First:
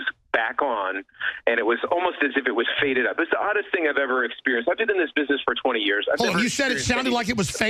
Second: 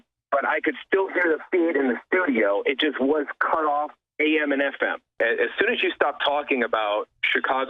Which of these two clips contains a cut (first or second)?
second